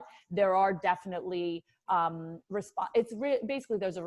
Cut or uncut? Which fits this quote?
uncut